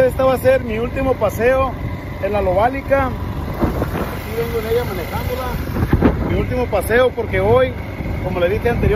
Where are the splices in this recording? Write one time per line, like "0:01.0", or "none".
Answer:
none